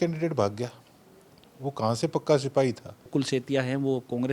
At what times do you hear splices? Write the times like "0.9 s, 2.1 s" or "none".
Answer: 3.1 s

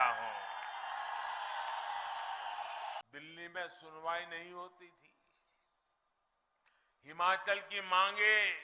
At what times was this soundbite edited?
3.0 s

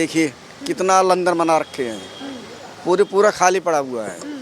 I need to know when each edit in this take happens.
none

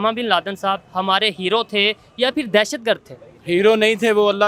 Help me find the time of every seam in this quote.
none

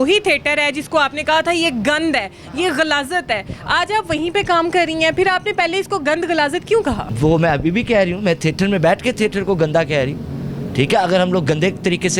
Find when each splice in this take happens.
none

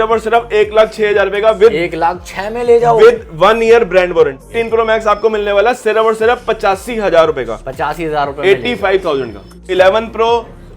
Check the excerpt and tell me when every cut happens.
4.6 s, 9.6 s

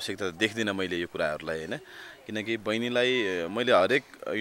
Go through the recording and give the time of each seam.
none

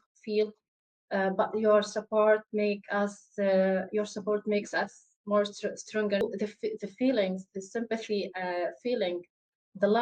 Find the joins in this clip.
6.2 s

